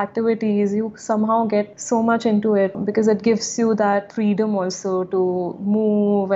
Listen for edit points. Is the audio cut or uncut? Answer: cut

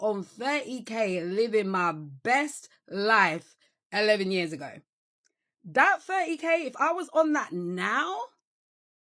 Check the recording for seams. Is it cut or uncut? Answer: uncut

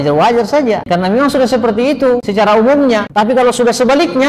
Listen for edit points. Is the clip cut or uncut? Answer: cut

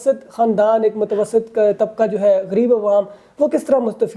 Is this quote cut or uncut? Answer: uncut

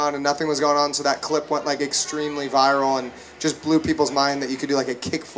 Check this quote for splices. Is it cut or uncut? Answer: uncut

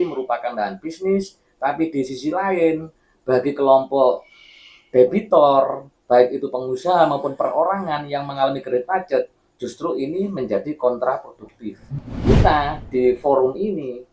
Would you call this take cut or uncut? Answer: cut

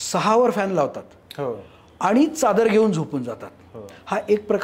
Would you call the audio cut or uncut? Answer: uncut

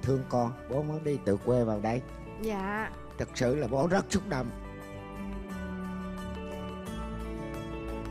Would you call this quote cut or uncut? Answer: uncut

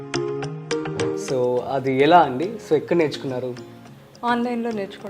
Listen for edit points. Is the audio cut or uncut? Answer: cut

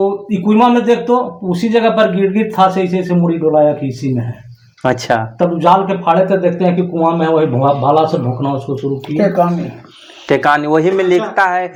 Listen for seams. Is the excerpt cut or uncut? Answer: uncut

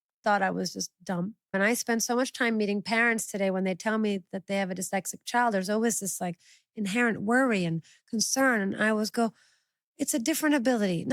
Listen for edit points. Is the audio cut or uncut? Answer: cut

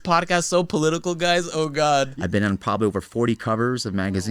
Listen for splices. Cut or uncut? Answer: cut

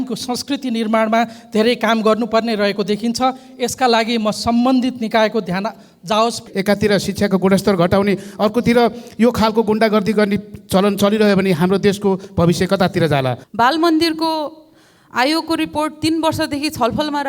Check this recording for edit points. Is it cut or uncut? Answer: cut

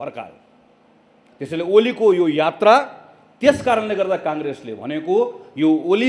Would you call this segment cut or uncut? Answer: uncut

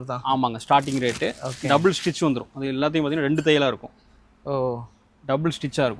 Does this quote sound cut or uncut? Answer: uncut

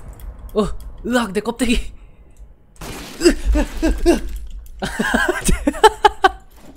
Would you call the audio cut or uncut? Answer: uncut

